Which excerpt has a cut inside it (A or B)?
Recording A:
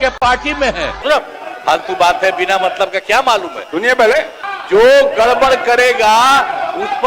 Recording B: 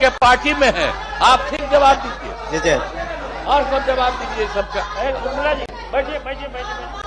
A